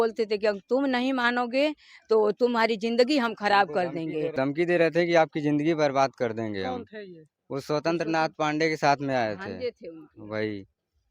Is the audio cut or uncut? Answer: cut